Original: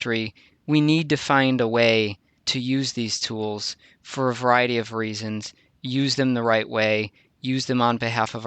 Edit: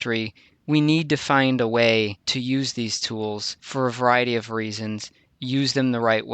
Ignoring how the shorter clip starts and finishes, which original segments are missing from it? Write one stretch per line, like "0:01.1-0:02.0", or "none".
0:02.2-0:02.4
0:03.7-0:04.0

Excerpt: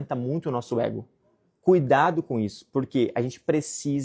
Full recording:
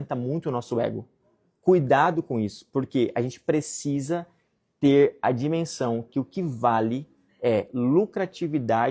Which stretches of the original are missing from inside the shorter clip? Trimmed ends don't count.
none

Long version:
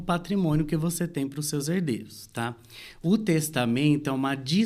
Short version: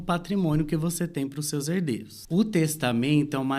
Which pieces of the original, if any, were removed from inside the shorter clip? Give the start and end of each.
0:02.1-0:02.9

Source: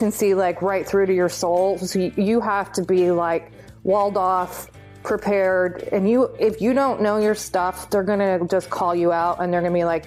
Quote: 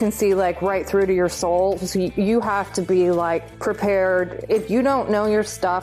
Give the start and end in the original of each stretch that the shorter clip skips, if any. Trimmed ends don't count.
0:03.5-0:05.0
0:05.9-0:06.3

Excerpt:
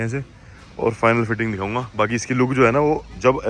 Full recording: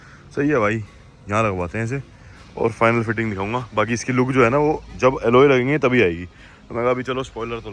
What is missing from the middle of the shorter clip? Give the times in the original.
none

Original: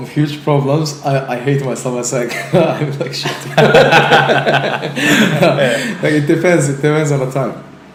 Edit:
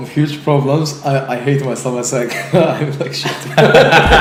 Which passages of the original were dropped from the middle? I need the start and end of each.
none

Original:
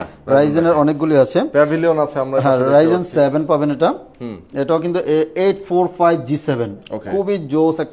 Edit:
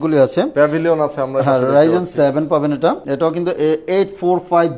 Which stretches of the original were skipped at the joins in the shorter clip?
0:04.0-0:04.5

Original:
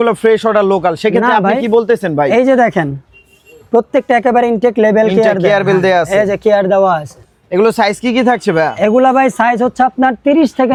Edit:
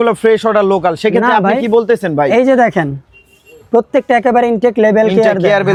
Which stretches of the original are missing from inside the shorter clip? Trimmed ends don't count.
none

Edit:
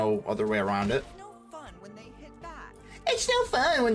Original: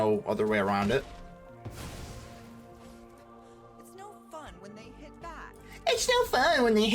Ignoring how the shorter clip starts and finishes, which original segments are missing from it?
0:01.1-0:03.9

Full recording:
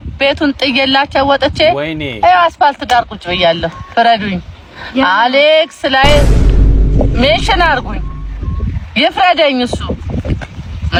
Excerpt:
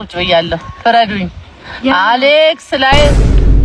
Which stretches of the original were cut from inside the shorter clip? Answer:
none

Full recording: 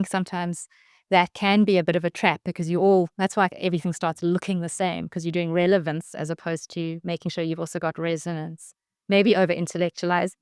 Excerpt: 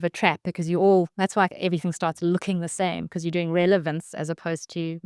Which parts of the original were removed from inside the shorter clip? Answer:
none

